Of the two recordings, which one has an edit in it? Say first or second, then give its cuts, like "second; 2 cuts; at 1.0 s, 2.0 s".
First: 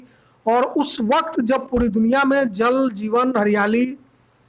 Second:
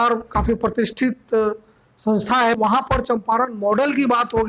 second; 1 cut; at 2.6 s